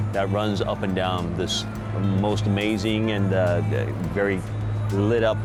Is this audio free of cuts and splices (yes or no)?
yes